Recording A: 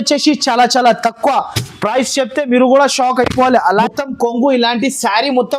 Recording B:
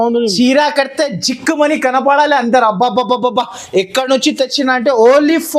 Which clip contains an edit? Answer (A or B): A